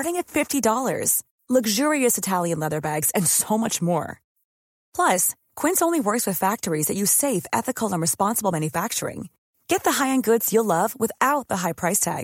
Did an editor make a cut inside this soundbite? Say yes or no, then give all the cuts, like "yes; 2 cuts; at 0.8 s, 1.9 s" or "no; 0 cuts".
no; 0 cuts